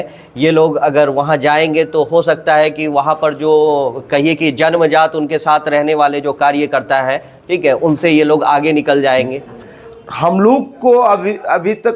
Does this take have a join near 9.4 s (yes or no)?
yes